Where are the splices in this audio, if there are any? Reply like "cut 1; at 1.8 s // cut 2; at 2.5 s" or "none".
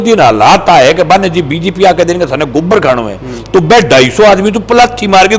none